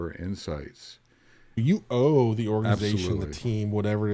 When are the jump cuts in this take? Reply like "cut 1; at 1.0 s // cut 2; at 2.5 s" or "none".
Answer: cut 1; at 1.6 s